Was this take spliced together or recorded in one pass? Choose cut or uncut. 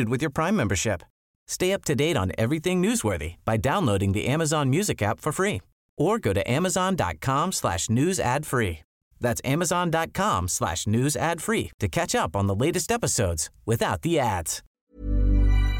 cut